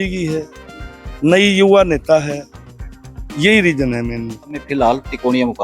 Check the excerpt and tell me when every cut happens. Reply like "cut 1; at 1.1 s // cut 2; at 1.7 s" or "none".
cut 1; at 4.6 s